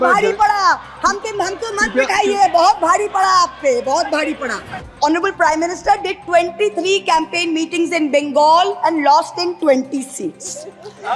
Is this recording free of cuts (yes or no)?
no